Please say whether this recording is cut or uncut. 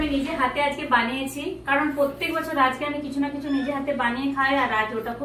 uncut